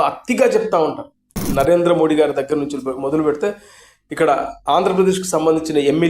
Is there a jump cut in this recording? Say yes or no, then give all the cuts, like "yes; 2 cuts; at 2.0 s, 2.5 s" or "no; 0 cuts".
yes; 1 cut; at 1.5 s